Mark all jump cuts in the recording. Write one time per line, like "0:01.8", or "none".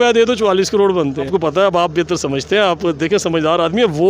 0:01.3